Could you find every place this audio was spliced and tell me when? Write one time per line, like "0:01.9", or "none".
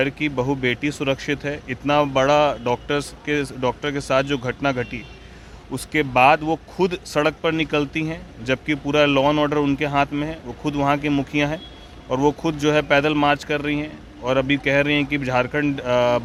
none